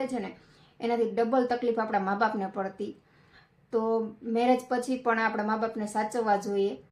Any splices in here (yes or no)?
no